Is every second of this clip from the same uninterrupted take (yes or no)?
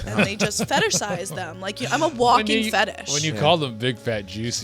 yes